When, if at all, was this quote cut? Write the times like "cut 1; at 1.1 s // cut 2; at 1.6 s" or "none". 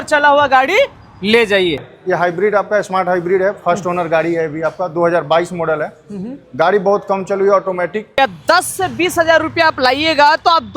cut 1; at 1.9 s // cut 2; at 8.2 s